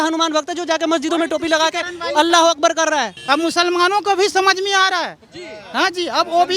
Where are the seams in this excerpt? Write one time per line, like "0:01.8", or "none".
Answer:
0:03.2

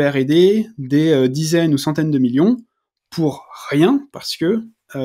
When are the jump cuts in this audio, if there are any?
none

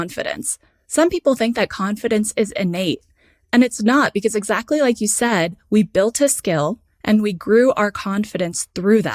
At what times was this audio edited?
none

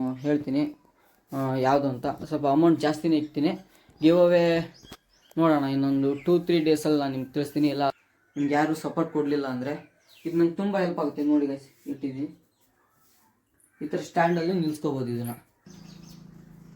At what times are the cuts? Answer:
0:07.9
0:15.7

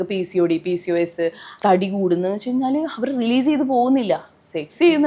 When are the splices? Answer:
0:01.4

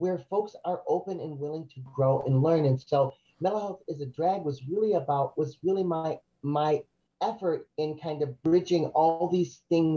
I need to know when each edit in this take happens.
none

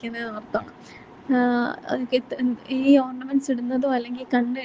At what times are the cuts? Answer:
none

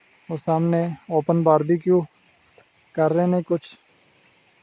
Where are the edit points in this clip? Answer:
none

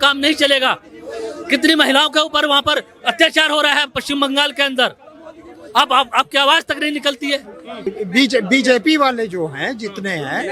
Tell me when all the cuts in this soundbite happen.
0:07.9

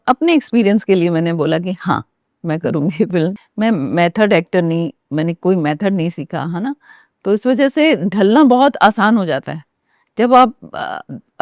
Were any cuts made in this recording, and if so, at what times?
0:03.4

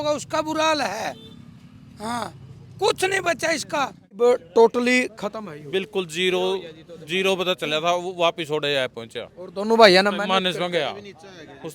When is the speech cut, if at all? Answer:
0:04.2

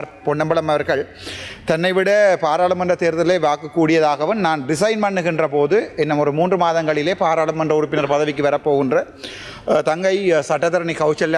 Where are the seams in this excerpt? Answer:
none

